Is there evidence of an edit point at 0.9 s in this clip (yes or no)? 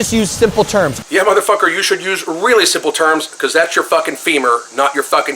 yes